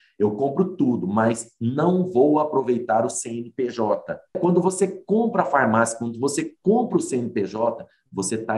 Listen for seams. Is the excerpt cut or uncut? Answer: cut